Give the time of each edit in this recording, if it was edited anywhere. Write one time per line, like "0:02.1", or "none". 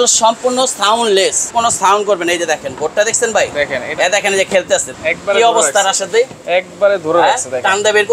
0:01.5
0:04.9

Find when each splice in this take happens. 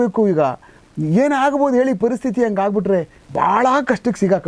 0:03.2

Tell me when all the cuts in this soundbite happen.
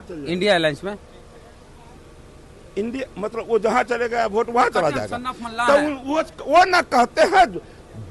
none

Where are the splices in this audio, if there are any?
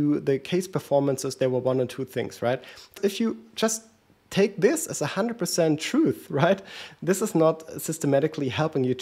0:02.9

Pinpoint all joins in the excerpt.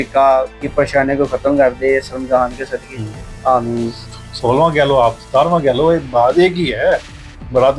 0:04.0

